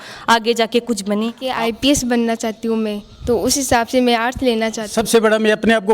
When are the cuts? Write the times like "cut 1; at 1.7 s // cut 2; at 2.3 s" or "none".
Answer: cut 1; at 1.4 s // cut 2; at 4.9 s